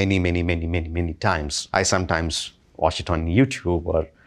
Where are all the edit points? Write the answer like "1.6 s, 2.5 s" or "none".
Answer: 1.6 s